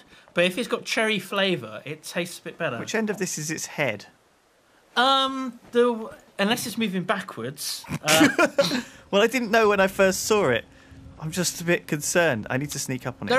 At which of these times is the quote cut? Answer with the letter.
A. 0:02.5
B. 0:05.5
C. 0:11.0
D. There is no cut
D